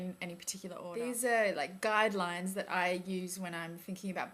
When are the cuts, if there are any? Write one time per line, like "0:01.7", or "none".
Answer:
0:03.1